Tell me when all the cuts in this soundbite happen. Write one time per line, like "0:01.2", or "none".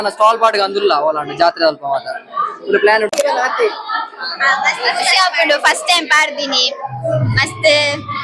0:03.1